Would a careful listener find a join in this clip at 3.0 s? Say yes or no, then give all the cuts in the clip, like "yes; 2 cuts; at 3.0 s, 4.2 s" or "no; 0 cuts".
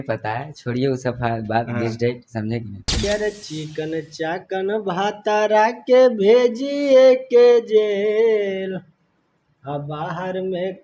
yes; 1 cut; at 3.0 s